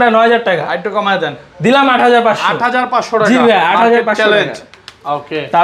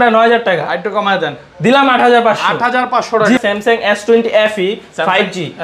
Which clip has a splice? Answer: second; 1 cut; at 3.4 s

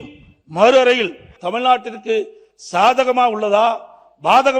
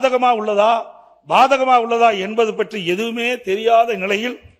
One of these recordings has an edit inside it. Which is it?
first; 1 cut; at 1.3 s

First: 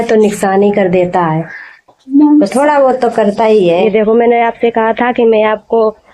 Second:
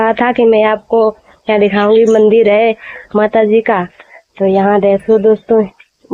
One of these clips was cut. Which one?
first; 1 cut; at 3.8 s

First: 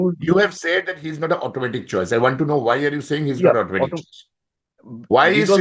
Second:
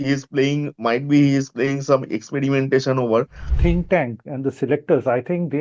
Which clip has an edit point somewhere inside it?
second; 1 cut; at 3.5 s

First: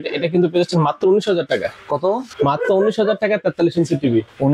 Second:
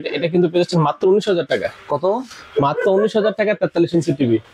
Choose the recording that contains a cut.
first; 1 cut; at 2.3 s

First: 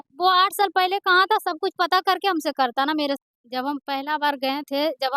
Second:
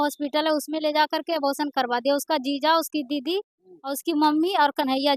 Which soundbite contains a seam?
first; 1 cut; at 3.2 s

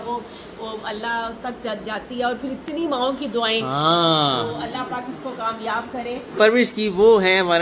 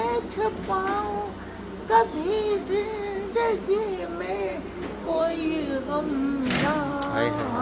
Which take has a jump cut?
first; 1 cut; at 6.3 s

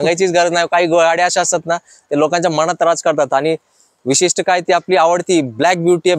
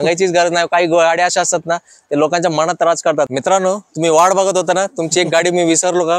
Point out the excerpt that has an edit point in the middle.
second; 1 cut; at 3.3 s

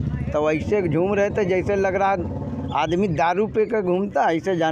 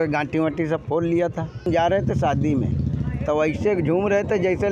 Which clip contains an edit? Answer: second; 1 cut; at 1.7 s

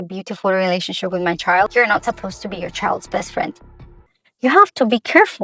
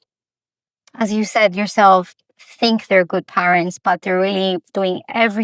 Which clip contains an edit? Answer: first; 2 cuts; at 1.7 s, 4.1 s

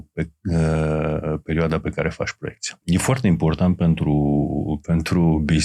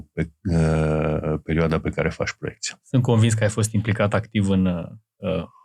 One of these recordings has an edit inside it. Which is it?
first; 1 cut; at 2.7 s

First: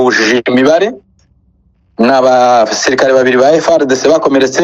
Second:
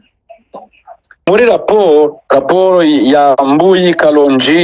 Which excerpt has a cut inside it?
second; 1 cut; at 1.3 s

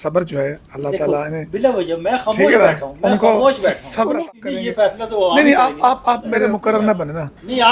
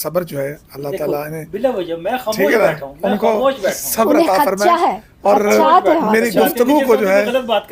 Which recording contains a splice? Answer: first; 2 cuts; at 4.3 s, 6.5 s

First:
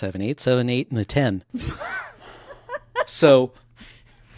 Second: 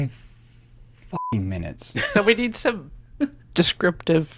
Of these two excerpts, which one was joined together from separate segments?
first; 1 cut; at 1.5 s

